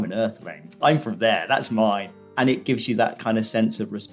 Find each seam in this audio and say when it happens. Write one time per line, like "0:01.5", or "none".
0:02.3